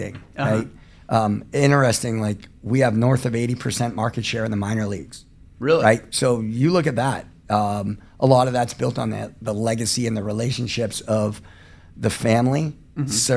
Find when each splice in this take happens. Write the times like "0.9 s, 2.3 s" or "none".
none